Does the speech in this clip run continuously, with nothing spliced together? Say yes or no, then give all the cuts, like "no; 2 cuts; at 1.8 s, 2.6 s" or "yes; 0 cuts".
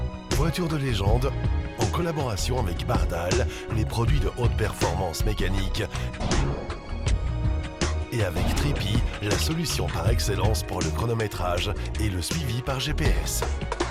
yes; 0 cuts